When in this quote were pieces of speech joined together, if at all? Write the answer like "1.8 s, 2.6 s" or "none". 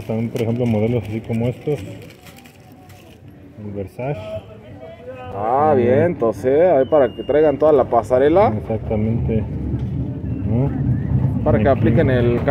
none